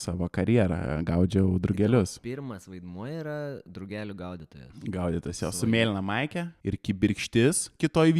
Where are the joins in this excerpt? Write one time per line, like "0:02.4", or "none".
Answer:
0:06.5